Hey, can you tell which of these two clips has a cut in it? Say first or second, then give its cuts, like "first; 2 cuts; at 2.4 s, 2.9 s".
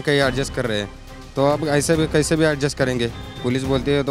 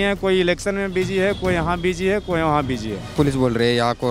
second; 1 cut; at 3.1 s